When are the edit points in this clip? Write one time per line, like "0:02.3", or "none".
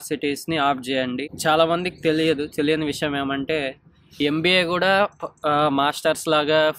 0:01.4